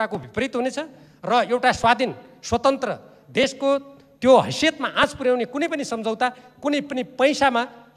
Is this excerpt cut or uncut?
uncut